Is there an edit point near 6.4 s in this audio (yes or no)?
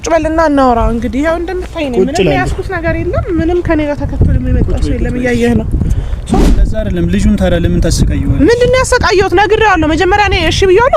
yes